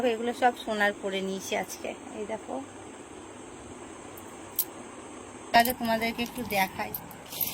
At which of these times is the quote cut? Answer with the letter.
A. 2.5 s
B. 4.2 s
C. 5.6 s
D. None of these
C